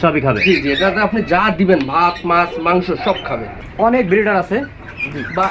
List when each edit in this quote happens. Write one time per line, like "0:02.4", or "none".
0:03.6